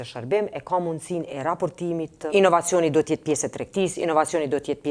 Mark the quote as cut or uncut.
cut